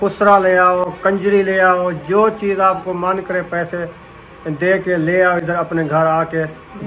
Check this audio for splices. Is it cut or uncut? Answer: uncut